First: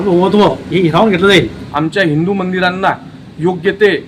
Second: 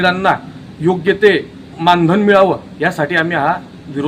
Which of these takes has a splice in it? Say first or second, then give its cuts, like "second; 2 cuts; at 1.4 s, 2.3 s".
first; 1 cut; at 1.6 s